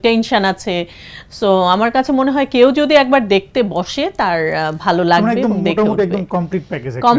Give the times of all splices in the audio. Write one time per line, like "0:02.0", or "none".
none